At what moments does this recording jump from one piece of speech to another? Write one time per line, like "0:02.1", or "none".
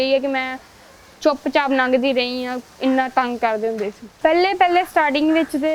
0:04.0